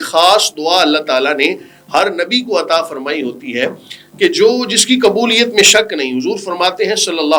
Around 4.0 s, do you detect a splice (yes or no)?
no